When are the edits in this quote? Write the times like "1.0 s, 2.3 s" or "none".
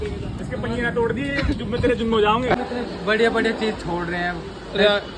2.5 s